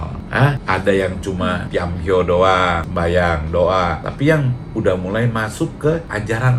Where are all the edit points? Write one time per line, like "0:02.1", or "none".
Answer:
none